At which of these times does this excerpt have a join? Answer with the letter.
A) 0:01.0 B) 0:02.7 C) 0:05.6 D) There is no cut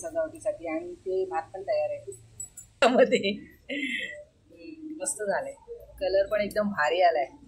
B